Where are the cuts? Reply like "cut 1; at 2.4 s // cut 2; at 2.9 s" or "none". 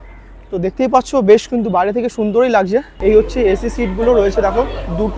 cut 1; at 2.9 s